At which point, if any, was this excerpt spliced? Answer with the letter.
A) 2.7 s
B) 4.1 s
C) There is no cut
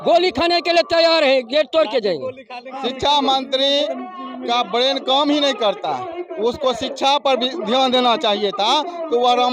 A